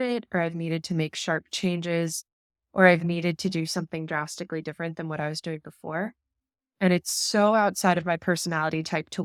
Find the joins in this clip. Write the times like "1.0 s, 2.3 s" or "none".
none